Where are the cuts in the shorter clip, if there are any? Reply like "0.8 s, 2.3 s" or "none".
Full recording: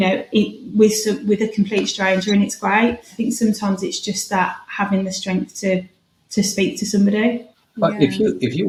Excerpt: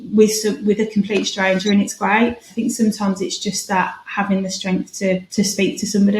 5.3 s